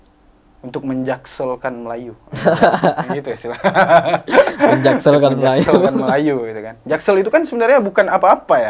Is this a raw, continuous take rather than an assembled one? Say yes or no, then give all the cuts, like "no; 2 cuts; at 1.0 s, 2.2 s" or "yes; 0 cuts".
yes; 0 cuts